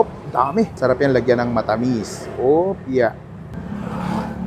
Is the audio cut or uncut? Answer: cut